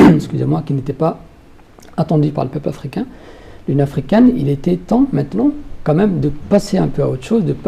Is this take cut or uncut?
uncut